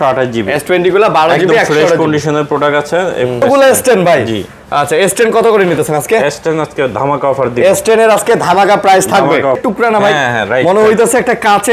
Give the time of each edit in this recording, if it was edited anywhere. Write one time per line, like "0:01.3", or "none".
0:03.4
0:09.6